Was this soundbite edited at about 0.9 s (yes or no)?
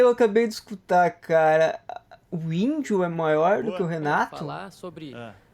no